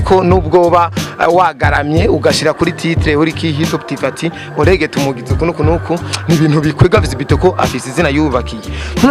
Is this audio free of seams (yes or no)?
yes